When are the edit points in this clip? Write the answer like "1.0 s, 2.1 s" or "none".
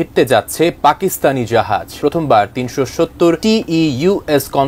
1.9 s, 3.4 s